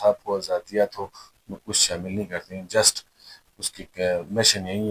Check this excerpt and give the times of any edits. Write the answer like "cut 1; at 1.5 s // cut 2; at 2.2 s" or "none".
none